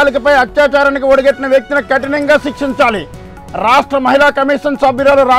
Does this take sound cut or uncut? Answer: uncut